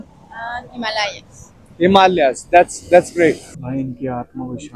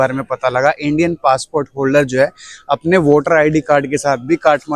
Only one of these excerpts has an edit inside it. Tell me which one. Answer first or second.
first